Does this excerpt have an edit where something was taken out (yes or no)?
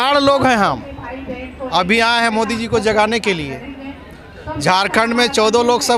no